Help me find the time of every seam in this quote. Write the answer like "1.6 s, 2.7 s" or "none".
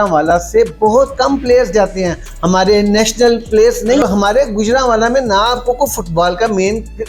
4.0 s